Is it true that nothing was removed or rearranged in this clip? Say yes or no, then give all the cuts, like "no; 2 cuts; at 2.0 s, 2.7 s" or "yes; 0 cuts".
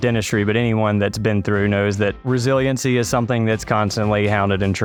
yes; 0 cuts